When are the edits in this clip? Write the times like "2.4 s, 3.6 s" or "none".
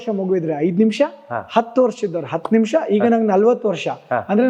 none